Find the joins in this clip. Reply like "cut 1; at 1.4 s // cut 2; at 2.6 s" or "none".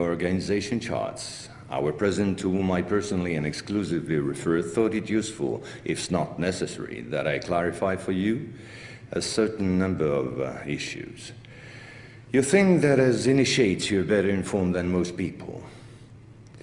cut 1; at 11.9 s